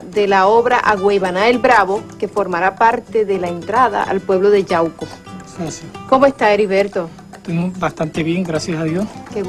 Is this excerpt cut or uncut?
cut